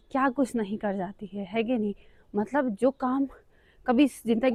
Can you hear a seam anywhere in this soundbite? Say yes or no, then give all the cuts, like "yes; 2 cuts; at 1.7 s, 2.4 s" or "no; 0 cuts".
no; 0 cuts